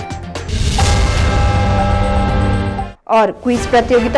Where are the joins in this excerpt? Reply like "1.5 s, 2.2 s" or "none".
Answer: 2.9 s

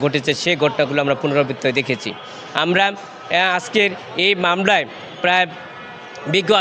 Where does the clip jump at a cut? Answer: none

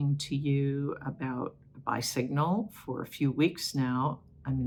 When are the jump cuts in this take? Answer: none

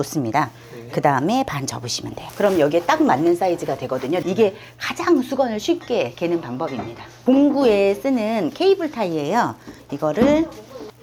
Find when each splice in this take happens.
4.2 s, 7.1 s

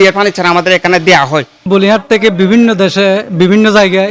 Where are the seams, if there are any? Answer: 1.6 s

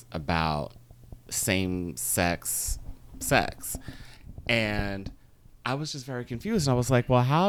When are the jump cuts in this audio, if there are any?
none

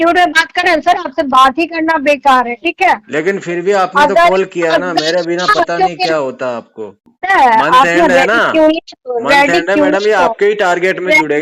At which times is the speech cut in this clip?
7.1 s

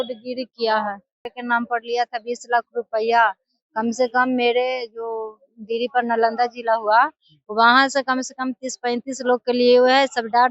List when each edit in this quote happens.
1.3 s

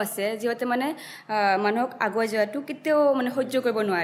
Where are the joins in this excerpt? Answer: none

